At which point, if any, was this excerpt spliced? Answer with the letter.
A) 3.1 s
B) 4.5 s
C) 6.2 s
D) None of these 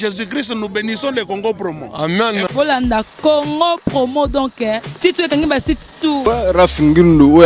C